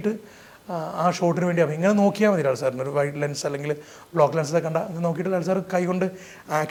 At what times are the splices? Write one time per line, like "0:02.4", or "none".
none